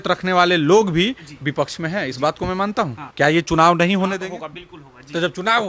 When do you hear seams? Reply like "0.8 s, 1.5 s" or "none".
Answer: 3.0 s